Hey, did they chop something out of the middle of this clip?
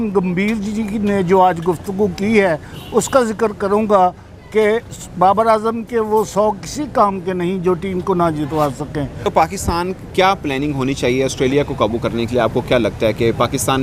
no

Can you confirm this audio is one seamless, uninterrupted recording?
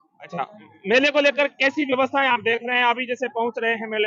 yes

